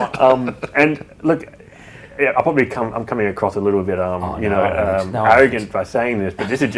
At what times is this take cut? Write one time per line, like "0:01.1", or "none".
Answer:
none